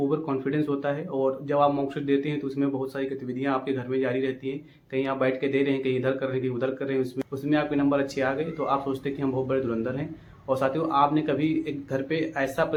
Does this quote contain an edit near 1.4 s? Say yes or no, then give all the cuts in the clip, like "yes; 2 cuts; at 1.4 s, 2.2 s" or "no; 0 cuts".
no; 0 cuts